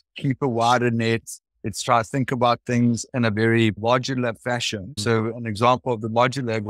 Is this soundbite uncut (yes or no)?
no